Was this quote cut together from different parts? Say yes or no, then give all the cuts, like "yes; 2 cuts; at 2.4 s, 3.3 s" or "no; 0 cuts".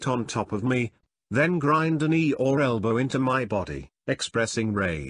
no; 0 cuts